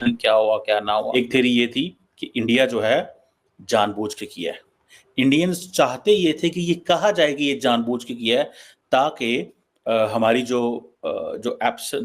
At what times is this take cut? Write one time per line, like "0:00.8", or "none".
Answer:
0:01.1